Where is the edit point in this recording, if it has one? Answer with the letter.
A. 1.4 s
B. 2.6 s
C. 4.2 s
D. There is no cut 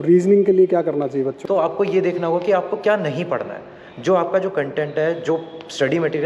A